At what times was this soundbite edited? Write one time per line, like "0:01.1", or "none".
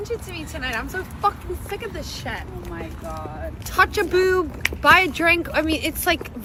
none